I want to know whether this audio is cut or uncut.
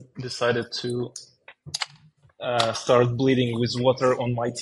uncut